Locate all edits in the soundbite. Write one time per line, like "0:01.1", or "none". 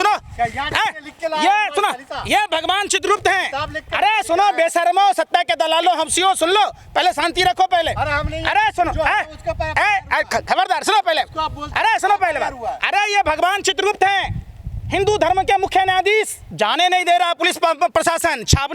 0:16.4